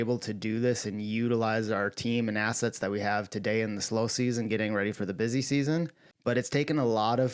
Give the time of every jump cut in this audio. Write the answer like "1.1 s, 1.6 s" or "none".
none